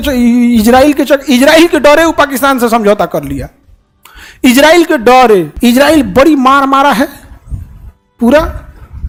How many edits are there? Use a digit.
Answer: 0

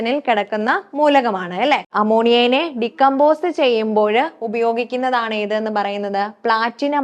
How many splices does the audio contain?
1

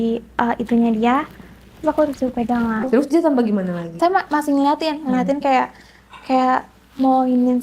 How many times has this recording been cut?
2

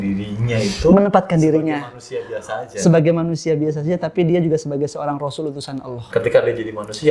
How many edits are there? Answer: 1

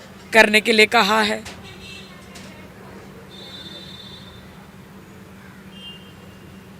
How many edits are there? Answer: 0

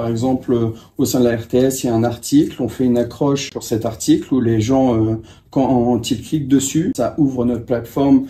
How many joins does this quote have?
2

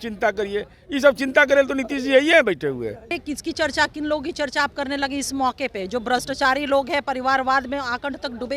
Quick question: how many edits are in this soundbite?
1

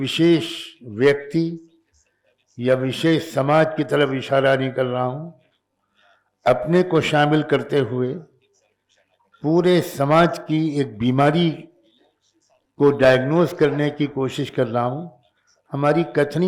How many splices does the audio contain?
0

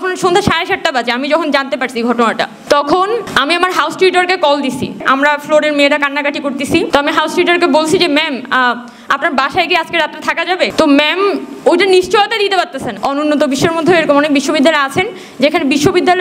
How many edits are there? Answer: 6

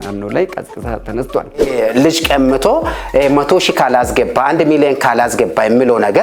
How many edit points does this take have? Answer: 1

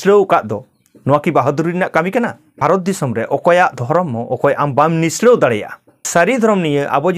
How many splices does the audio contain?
2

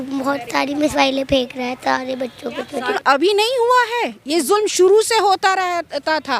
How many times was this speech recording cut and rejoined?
1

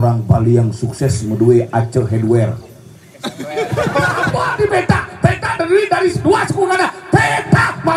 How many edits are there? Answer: 1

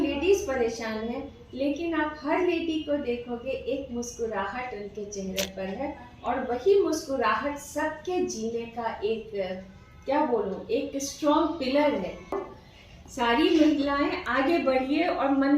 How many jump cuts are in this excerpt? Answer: 1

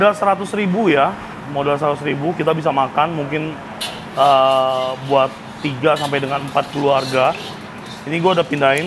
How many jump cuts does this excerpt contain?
0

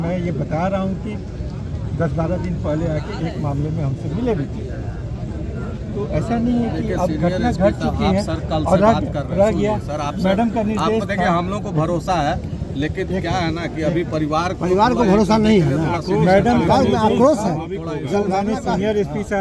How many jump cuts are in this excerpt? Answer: 0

